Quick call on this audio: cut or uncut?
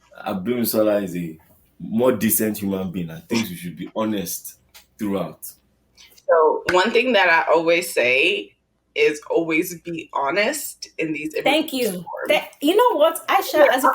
cut